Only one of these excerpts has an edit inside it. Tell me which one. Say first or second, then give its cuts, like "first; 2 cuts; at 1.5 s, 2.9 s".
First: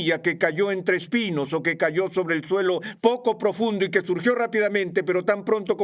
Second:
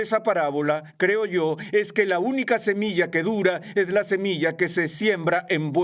first; 1 cut; at 2.9 s